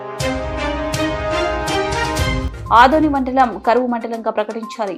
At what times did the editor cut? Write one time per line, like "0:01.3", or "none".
0:02.4